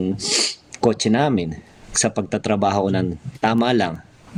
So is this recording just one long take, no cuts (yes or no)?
yes